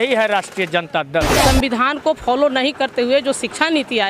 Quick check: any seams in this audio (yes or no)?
yes